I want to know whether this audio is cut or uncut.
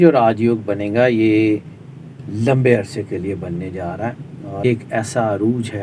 cut